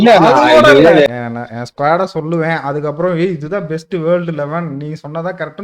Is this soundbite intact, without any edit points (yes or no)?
no